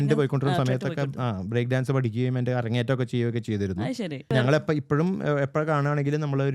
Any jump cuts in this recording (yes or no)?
yes